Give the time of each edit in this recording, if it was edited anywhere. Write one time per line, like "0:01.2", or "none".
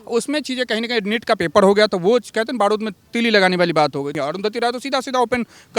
0:04.1